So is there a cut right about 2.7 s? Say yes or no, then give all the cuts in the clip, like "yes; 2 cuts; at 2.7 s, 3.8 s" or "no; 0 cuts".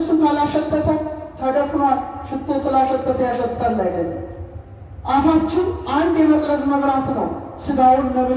no; 0 cuts